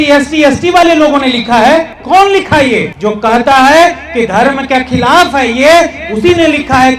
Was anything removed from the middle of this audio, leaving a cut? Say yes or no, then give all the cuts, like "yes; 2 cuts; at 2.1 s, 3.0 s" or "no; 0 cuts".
yes; 2 cuts; at 2.0 s, 2.9 s